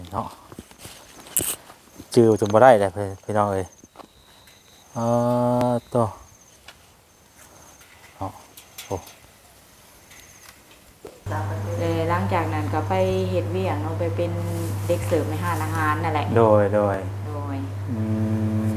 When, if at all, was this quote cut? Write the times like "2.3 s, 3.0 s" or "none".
11.3 s

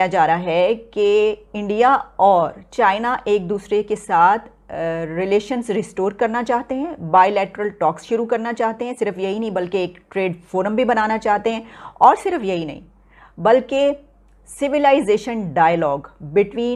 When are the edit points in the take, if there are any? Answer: none

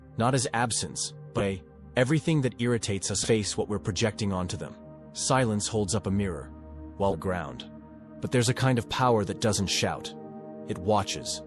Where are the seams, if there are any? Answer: 1.4 s, 3.1 s, 7.1 s

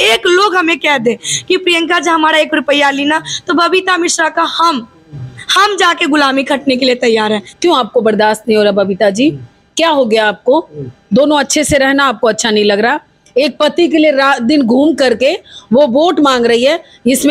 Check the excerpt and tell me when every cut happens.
7.5 s

